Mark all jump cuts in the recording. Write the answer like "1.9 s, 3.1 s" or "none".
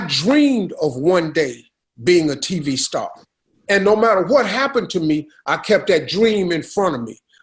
none

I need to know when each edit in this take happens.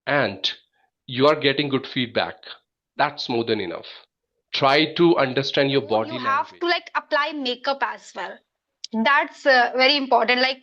6.1 s

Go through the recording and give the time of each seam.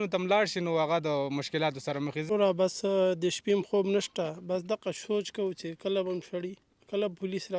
2.3 s

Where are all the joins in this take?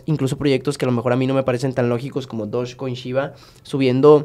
none

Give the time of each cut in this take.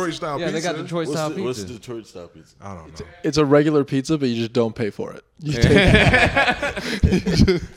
3.3 s

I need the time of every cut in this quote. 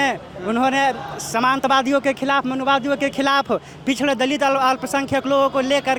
none

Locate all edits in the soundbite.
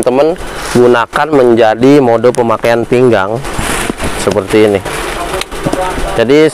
none

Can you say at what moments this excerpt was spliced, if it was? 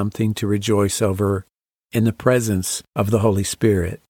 2.8 s

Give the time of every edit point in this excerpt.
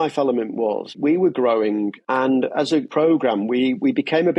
1.0 s, 2.0 s, 2.9 s

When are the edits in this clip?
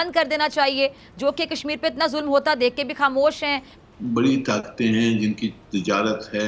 3.7 s

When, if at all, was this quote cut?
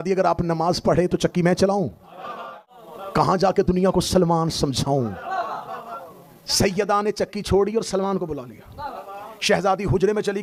none

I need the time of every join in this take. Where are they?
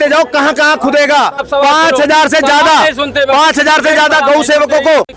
1.4 s

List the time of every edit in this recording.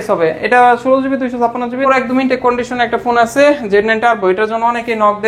1.8 s

